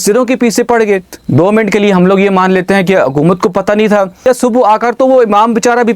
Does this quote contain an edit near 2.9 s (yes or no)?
no